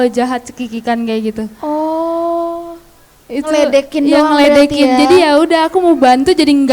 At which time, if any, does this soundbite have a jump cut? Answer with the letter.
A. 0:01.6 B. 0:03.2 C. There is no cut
C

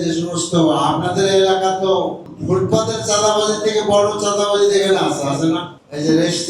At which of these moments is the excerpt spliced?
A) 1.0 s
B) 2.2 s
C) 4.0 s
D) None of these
B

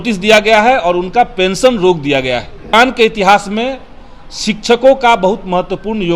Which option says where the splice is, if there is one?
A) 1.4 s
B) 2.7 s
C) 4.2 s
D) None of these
B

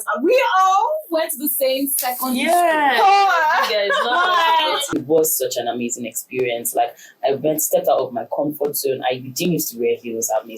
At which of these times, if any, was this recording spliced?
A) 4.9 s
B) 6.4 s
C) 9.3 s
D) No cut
A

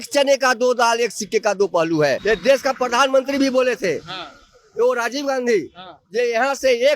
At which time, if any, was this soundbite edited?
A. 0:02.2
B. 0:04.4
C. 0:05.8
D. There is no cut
A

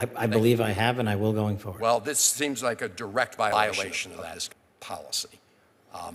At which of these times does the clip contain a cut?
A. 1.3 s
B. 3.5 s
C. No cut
B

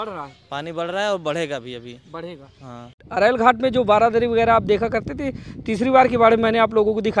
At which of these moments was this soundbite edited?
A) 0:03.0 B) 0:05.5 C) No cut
A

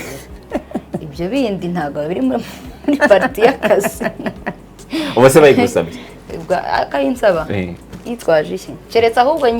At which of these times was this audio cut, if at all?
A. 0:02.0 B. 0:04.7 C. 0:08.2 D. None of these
D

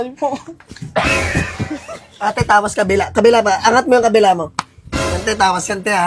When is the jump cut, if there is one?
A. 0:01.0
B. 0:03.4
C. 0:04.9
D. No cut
D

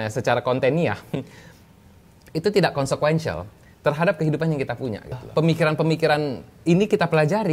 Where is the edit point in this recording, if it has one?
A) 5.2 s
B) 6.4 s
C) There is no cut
A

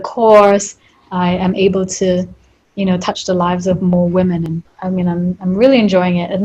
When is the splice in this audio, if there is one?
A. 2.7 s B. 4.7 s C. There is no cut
B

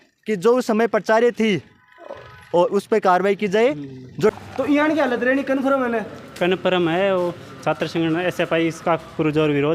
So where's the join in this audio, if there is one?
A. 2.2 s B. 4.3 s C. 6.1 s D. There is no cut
B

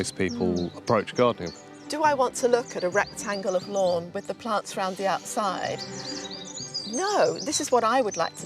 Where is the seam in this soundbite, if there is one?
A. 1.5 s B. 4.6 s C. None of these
A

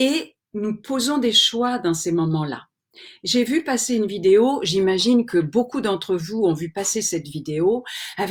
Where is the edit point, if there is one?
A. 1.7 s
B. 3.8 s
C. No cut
C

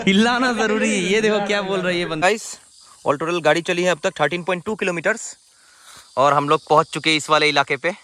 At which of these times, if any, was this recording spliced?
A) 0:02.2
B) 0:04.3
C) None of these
A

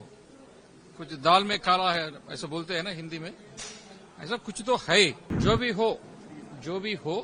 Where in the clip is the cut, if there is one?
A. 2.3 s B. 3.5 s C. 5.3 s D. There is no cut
C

